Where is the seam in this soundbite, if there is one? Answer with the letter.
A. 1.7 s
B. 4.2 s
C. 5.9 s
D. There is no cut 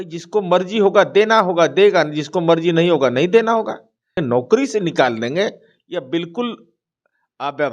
B